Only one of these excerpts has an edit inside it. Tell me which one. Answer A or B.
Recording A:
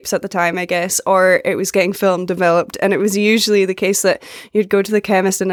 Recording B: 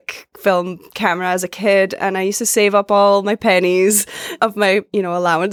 B